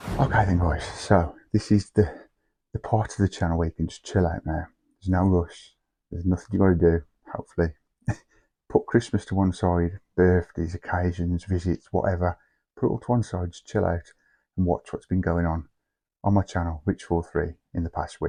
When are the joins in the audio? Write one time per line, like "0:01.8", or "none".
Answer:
none